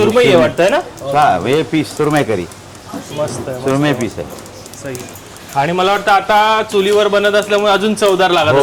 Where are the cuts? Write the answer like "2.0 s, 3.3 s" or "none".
none